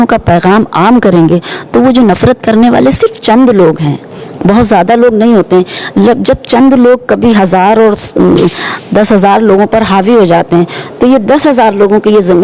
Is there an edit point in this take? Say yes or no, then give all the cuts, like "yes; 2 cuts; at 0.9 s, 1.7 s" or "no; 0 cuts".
no; 0 cuts